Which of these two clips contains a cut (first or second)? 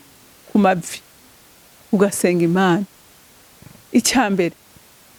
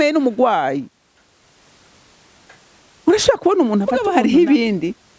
second